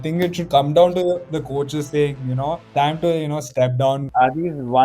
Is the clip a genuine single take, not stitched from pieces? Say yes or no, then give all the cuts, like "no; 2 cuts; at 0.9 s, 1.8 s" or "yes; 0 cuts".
no; 2 cuts; at 2.6 s, 3.9 s